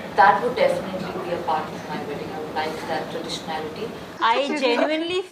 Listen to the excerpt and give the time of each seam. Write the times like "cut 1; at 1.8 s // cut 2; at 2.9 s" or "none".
cut 1; at 4.1 s